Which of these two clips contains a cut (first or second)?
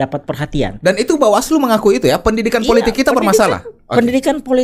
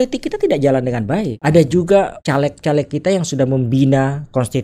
second